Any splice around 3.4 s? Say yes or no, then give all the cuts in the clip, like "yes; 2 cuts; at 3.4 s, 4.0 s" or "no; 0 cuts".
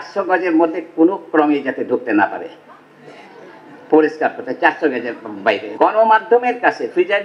no; 1 cut; at 5.7 s